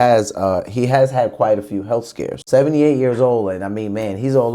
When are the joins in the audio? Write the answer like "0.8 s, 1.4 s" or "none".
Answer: 2.4 s